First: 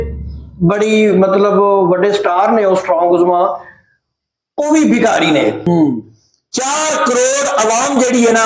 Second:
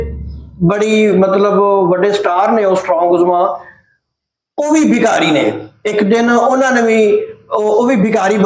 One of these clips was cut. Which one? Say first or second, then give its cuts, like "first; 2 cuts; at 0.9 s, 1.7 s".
first; 1 cut; at 5.6 s